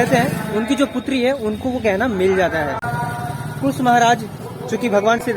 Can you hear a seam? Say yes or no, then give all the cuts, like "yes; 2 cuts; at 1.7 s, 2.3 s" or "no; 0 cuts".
yes; 1 cut; at 2.8 s